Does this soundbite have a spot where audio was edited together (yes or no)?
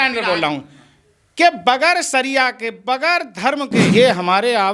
yes